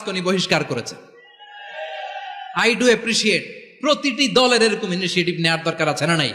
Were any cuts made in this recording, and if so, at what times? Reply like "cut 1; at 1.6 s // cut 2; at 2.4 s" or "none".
none